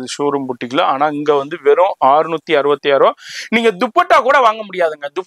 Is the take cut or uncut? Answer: uncut